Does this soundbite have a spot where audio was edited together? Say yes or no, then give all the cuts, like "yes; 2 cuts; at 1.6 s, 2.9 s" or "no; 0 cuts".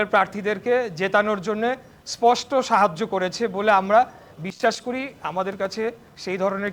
no; 0 cuts